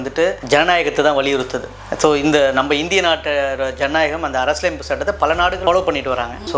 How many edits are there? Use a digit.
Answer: 1